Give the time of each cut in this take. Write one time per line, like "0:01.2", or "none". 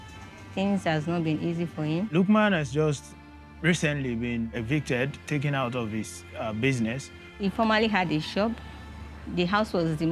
0:02.1
0:04.5
0:07.4